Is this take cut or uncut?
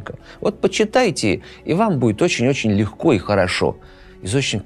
uncut